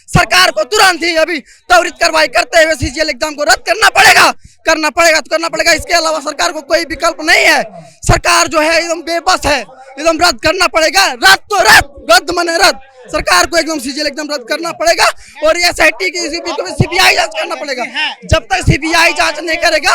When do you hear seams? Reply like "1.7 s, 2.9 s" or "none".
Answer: none